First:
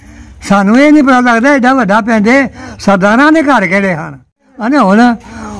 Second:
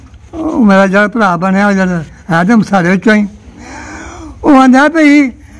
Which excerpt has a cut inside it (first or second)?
first